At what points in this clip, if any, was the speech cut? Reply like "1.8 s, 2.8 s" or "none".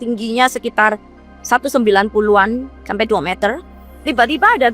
3.6 s